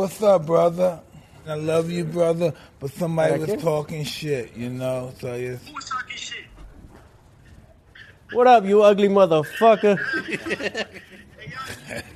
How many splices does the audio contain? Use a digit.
2